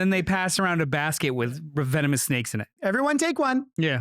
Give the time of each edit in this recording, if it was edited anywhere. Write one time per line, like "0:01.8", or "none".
0:02.6